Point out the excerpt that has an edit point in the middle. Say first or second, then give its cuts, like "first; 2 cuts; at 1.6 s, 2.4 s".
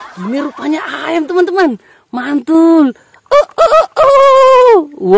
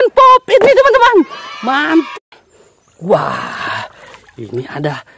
second; 1 cut; at 2.1 s